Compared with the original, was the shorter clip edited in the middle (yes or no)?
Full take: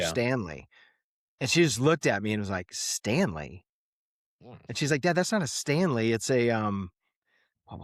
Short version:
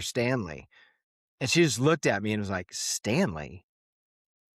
no